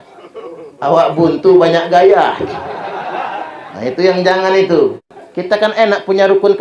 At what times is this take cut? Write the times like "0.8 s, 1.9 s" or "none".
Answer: 5.1 s